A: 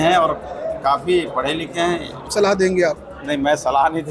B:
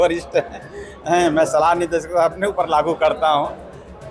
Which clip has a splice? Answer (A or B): A